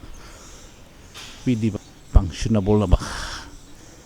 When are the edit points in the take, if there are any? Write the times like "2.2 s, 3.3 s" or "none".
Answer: 1.7 s

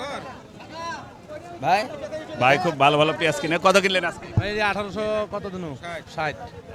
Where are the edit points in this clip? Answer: none

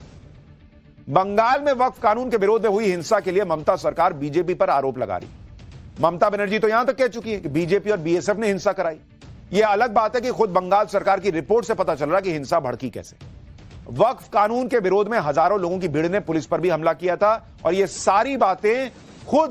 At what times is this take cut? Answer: 1.8 s

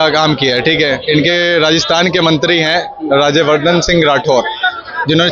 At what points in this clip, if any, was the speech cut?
none

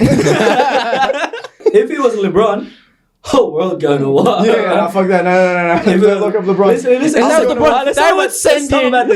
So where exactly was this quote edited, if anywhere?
1.6 s

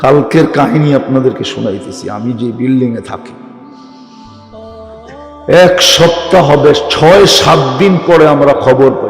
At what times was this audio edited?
3.2 s, 5.5 s

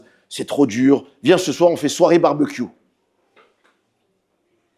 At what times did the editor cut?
none

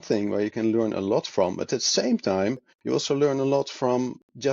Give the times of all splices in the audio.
none

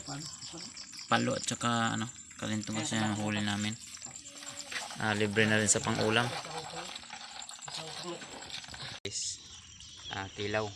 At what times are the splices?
9.0 s

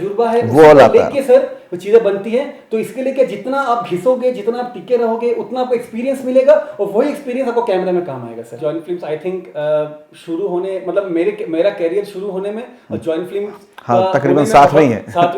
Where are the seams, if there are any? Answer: 8.6 s

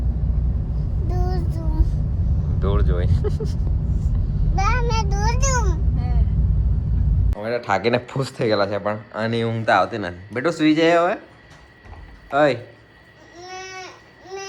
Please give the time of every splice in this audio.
7.3 s

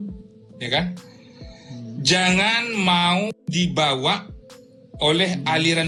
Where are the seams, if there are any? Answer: none

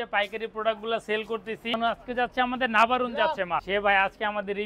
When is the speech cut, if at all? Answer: 1.7 s, 3.6 s

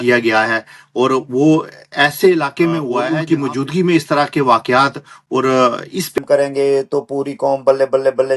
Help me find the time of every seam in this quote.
3.0 s, 6.2 s

